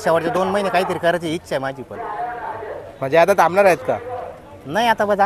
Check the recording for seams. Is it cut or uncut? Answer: uncut